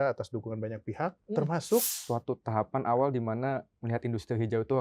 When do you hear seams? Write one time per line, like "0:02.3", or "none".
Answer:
0:02.0

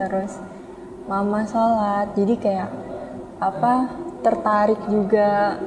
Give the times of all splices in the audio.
none

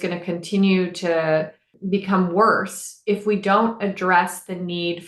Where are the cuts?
0:01.7

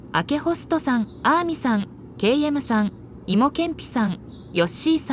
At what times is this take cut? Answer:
none

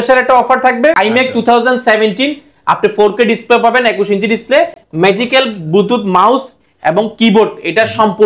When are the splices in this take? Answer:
0:00.9

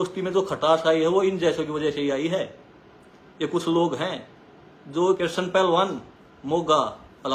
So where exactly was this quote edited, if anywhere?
0:05.0

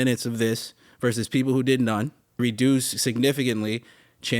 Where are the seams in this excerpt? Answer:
0:02.4

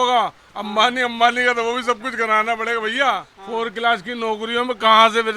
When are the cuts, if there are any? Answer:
0:03.3

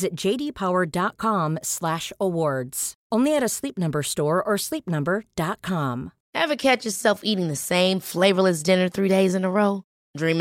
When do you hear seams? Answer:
0:06.2

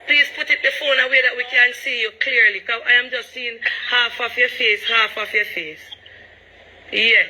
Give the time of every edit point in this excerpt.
none

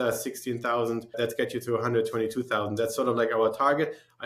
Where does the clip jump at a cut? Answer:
0:01.2

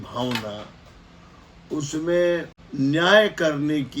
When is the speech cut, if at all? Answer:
0:02.6

